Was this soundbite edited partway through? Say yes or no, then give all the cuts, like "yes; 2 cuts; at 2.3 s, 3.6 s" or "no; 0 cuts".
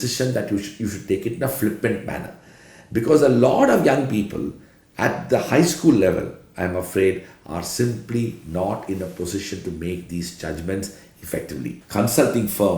yes; 1 cut; at 11.8 s